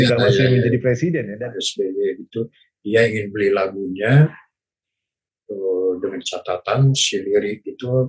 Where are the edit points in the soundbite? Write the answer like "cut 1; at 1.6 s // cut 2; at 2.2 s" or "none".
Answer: cut 1; at 1.3 s

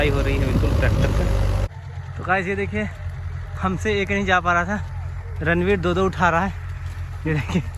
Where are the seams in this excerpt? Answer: cut 1; at 1.7 s

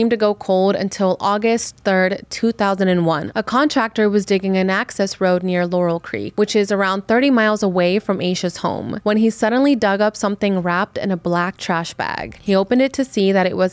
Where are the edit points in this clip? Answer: cut 1; at 3.3 s // cut 2; at 6.2 s // cut 3; at 8.9 s

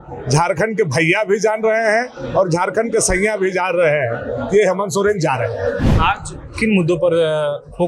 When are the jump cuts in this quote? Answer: cut 1; at 5.9 s

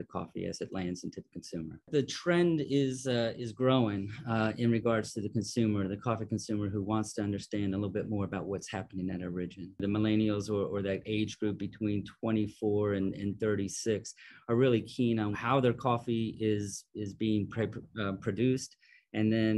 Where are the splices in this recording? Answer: cut 1; at 1.9 s // cut 2; at 9.8 s // cut 3; at 15.3 s

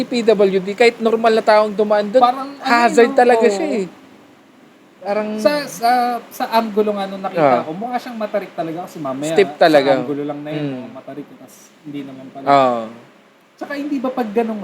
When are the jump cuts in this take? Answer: none

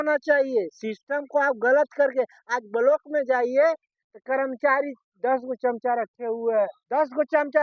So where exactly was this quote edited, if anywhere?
none

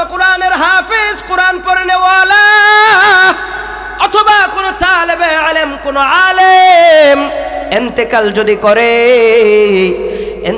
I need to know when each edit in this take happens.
none

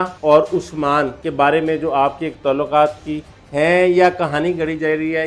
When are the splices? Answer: none

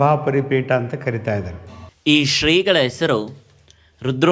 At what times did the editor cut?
cut 1; at 2.0 s

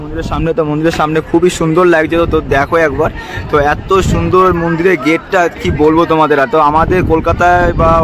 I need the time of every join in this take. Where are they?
none

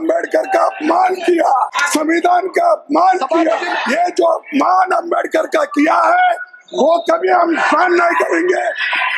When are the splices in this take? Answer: cut 1; at 1.8 s // cut 2; at 3.7 s

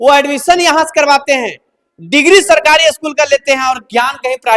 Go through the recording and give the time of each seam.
none

